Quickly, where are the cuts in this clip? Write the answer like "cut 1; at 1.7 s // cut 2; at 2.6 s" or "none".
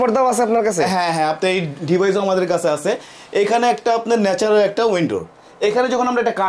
none